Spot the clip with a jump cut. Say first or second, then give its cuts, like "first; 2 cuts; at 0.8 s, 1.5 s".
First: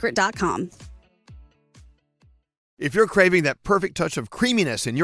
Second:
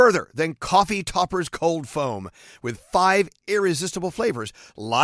first; 1 cut; at 2.7 s